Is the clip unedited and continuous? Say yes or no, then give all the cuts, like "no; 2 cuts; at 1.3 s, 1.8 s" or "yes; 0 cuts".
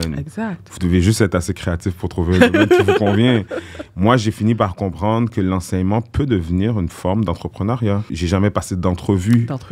no; 1 cut; at 8.1 s